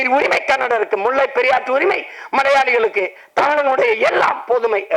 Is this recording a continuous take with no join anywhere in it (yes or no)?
yes